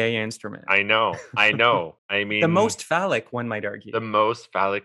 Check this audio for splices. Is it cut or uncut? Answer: cut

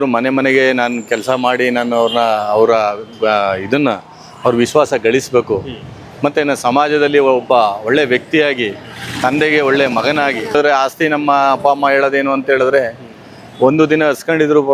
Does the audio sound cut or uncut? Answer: uncut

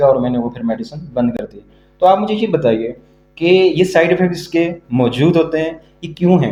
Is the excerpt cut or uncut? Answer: uncut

